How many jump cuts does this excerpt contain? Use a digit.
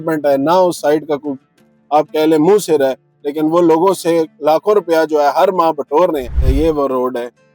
1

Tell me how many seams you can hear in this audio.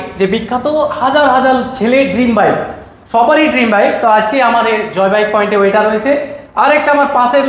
0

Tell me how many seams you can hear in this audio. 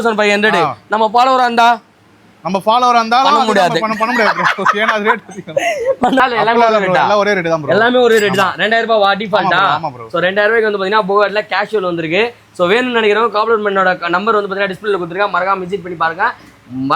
1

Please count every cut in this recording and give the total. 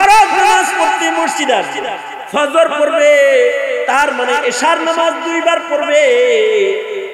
1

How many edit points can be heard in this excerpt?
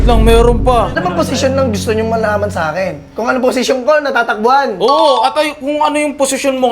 1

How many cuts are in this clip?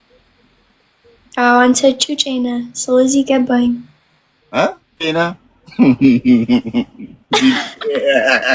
1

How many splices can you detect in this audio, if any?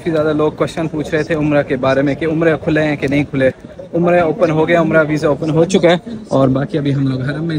0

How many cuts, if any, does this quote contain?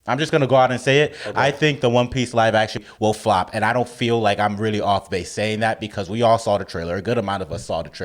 1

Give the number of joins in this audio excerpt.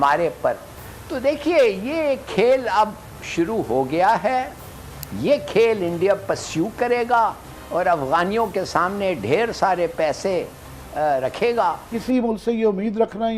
1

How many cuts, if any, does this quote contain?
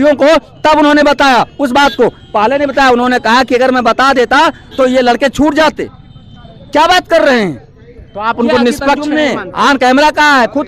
0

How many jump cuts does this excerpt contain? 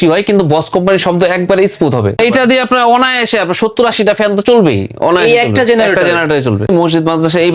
2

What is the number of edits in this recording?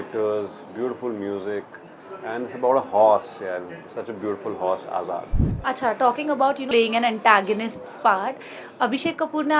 2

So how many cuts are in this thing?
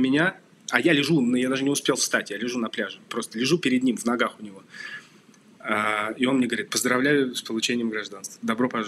0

